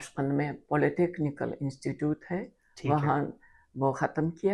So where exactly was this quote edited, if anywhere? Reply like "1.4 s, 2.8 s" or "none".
none

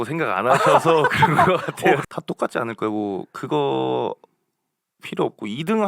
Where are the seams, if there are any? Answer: 2.0 s

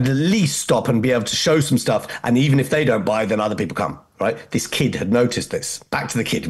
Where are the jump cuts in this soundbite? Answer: none

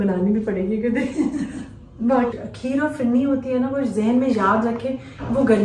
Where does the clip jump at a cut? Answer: 2.3 s

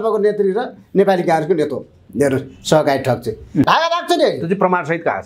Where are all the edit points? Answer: 3.7 s

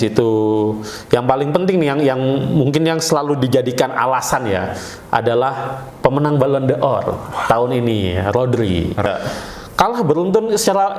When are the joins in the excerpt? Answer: 9.1 s

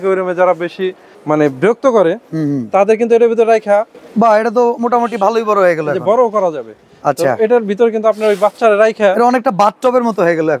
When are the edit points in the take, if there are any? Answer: none

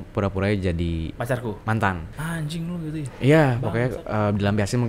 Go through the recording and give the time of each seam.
1.1 s

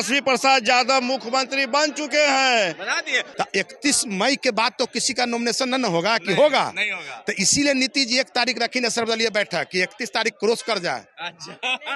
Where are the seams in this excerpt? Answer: 3.2 s

